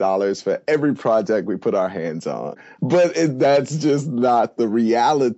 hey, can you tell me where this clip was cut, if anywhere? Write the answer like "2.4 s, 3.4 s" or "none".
2.6 s

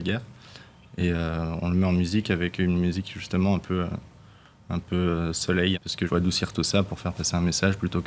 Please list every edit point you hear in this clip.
6.1 s

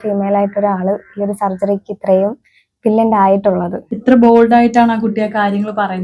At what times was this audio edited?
3.8 s

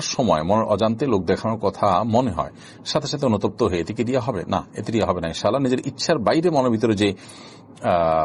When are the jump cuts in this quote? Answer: none

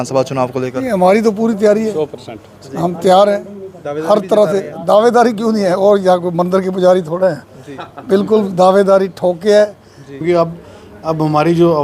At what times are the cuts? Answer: 10.2 s

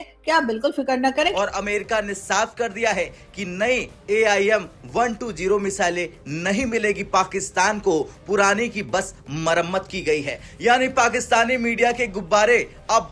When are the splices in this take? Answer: 1.3 s

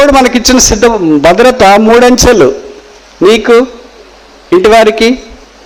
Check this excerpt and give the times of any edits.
none

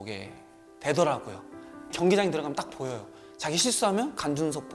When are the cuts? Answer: 1.8 s

